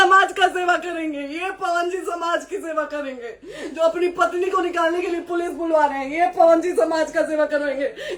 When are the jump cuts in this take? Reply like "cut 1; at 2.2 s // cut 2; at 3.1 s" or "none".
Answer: none